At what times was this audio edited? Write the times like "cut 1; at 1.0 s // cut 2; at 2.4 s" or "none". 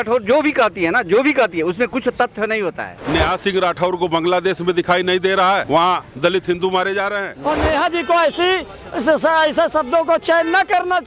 cut 1; at 2.9 s // cut 2; at 7.3 s